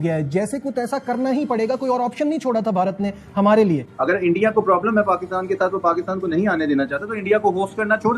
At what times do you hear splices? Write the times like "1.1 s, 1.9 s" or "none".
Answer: 3.9 s